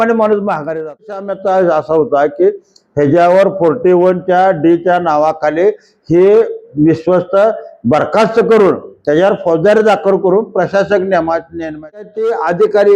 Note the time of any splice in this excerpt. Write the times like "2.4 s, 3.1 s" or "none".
1.3 s, 12.0 s